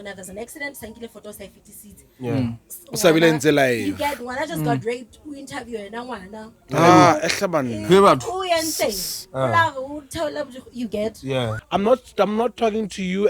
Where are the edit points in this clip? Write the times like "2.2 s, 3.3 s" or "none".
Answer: 11.6 s